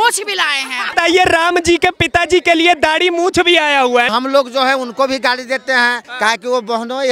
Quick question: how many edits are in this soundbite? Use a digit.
3